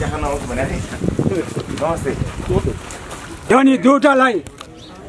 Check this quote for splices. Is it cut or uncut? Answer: cut